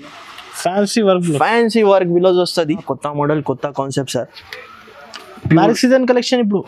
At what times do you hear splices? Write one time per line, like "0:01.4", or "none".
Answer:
0:02.8

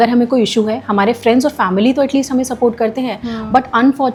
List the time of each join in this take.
none

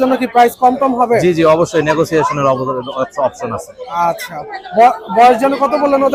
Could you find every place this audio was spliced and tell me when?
none

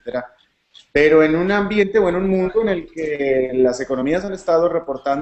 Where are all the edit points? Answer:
0:01.5

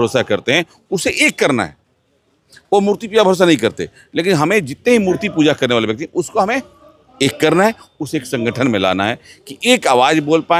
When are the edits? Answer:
none

